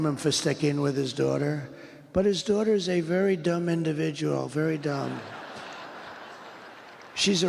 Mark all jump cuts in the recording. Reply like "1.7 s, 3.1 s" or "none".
5.3 s